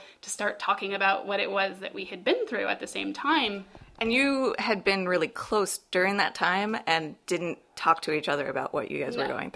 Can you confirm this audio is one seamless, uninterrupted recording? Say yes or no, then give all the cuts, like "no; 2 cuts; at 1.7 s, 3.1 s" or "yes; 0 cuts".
yes; 0 cuts